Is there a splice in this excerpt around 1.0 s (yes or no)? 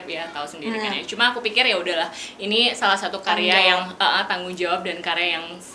no